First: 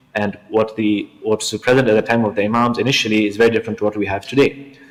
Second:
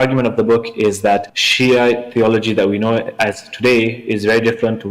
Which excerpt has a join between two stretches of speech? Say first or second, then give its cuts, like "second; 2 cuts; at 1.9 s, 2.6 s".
second; 1 cut; at 1.4 s